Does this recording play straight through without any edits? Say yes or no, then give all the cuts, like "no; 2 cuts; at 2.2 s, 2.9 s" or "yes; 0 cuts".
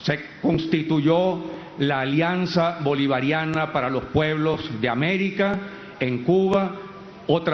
yes; 0 cuts